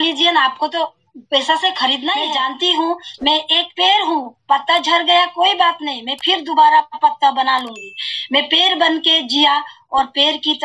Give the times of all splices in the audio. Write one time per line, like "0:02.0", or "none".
0:02.3